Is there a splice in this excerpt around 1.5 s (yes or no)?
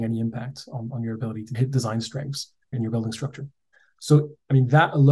yes